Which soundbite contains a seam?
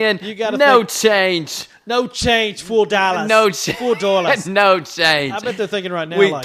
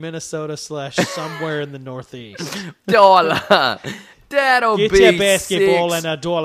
second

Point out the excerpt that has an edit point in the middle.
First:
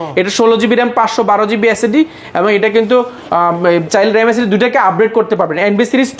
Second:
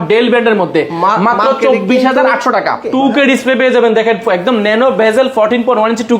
second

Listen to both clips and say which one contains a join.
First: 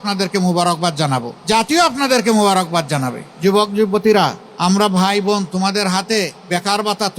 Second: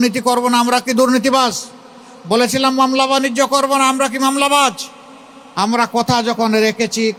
first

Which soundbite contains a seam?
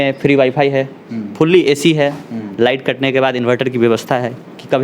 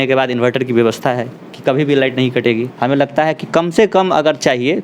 second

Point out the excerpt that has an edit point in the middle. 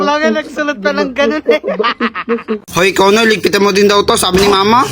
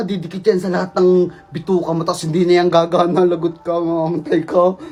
first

